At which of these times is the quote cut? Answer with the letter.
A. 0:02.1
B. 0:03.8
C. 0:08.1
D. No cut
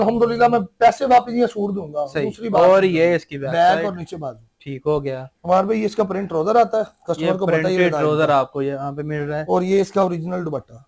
D